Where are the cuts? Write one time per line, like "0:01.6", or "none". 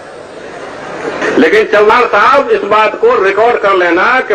0:01.2

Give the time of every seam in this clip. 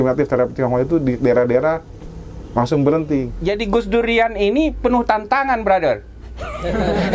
0:03.3

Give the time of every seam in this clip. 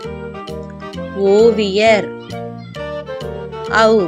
none

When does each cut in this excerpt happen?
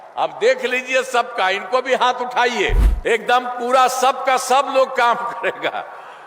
0:02.9

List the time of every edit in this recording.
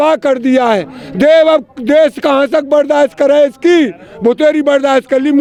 none

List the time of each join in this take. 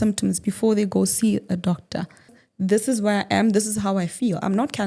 0:02.4

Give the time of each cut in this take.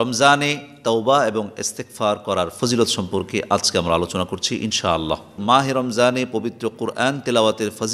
0:05.4

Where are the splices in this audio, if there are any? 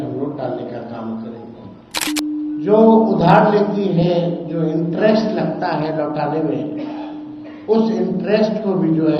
0:02.1

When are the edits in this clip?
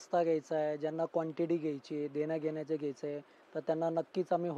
none

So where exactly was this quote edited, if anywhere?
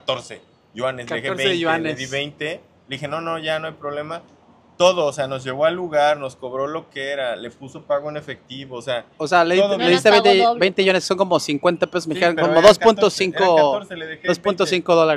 none

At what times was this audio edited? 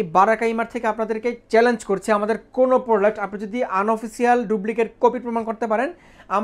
none

